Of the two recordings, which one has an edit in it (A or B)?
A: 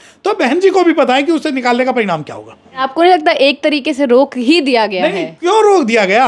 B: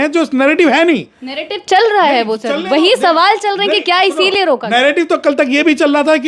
A